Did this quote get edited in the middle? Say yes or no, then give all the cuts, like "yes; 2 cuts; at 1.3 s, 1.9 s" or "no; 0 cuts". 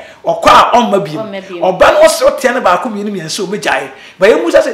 no; 0 cuts